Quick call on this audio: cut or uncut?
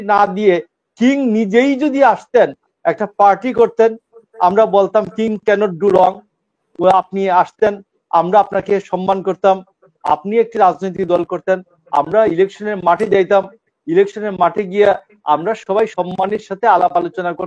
uncut